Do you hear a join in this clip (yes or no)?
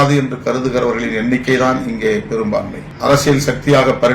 yes